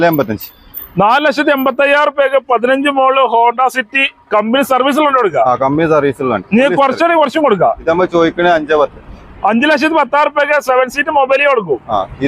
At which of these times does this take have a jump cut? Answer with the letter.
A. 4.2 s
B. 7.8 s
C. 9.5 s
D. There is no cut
B